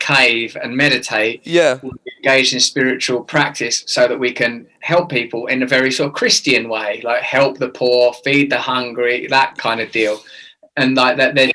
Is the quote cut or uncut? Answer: uncut